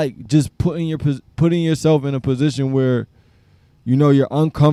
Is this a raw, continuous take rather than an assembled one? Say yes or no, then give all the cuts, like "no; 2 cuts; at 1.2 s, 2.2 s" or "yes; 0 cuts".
yes; 0 cuts